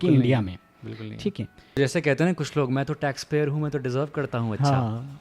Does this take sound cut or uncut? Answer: cut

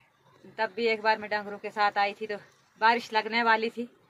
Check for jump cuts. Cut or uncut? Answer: uncut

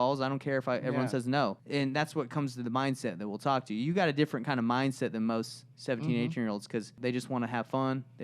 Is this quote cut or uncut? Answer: cut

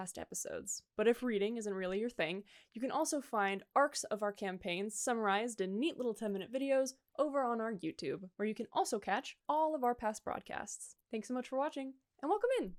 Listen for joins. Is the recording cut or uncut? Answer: uncut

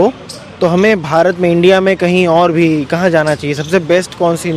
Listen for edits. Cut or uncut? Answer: uncut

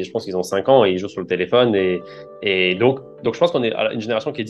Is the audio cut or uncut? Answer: uncut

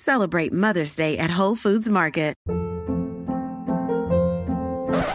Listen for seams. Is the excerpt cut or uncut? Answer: cut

